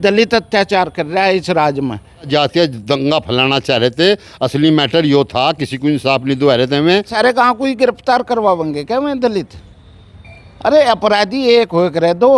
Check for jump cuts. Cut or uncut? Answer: cut